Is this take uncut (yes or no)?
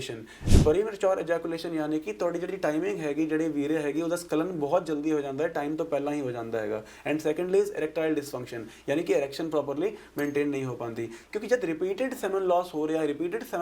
no